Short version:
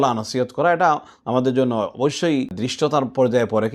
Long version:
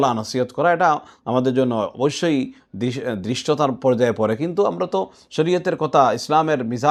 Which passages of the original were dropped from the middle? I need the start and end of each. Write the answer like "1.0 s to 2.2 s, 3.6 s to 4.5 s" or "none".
2.6 s to 3.3 s